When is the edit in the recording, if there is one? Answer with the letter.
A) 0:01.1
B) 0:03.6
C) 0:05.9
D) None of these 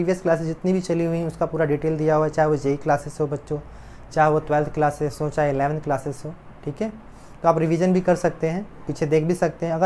C